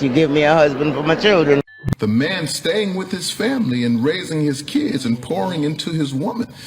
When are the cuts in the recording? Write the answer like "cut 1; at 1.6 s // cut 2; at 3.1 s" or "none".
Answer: cut 1; at 1.8 s